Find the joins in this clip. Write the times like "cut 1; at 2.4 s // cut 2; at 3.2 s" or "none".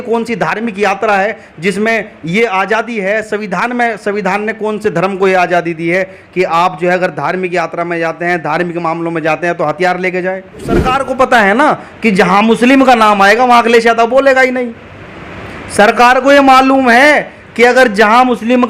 cut 1; at 10.9 s

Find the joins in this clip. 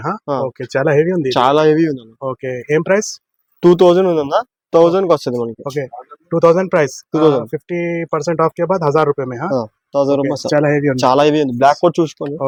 none

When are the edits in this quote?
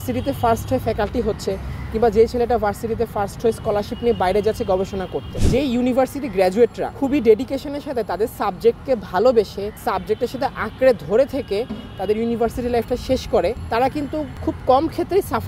cut 1; at 5.3 s // cut 2; at 6.8 s // cut 3; at 9.7 s // cut 4; at 14.0 s

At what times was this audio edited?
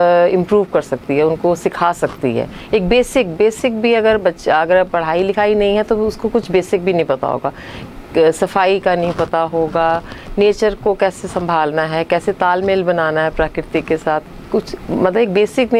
none

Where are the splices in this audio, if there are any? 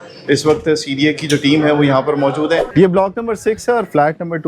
cut 1; at 2.7 s

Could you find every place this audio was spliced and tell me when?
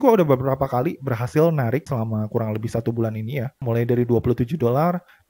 cut 1; at 1.9 s

